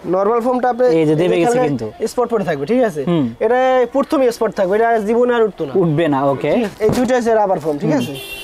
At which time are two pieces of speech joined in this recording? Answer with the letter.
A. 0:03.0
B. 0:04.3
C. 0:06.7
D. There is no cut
C